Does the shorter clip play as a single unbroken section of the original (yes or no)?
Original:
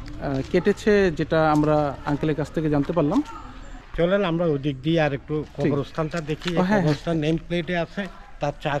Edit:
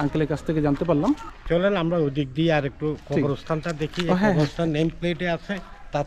no